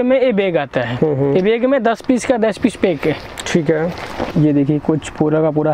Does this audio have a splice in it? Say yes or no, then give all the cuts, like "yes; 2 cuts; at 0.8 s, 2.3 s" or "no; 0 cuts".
yes; 1 cut; at 4.2 s